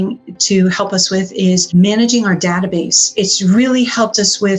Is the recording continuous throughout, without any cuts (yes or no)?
no